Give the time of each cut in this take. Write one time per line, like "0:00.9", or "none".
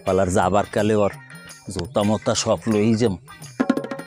none